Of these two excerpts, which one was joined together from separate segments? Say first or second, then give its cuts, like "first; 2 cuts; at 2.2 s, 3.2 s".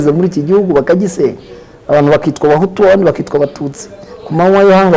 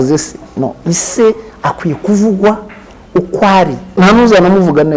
second; 1 cut; at 4.0 s